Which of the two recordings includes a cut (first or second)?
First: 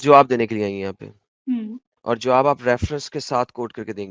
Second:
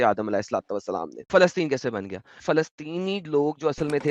second